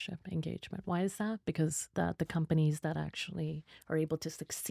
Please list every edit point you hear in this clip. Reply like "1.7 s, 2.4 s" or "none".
1.8 s